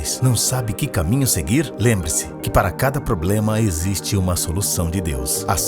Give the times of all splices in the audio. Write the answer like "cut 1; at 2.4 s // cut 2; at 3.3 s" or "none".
cut 1; at 3.3 s